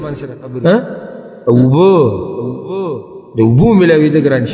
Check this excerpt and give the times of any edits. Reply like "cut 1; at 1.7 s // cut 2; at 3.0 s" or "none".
none